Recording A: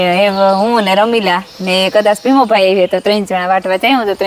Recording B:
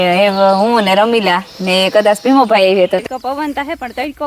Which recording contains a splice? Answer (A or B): B